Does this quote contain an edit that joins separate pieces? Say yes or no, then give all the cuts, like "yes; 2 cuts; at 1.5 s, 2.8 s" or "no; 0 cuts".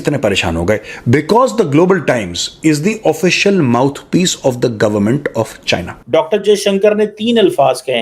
yes; 1 cut; at 5.9 s